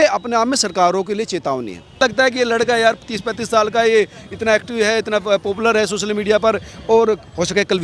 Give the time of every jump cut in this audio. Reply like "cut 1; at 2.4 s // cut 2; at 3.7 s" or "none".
cut 1; at 2.0 s